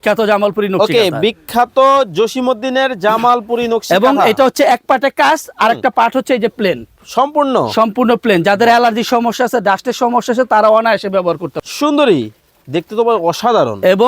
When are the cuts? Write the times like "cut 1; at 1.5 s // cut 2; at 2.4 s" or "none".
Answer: cut 1; at 11.6 s